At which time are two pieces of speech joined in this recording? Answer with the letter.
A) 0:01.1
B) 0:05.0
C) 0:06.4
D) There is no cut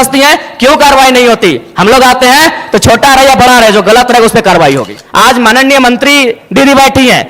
B